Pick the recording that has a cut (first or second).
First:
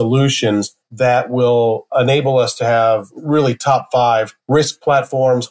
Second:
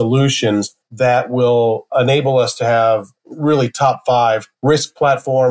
first